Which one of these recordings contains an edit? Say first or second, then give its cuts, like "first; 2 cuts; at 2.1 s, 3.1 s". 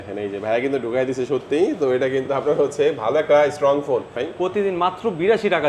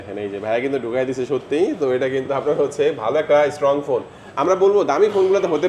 first; 1 cut; at 4.2 s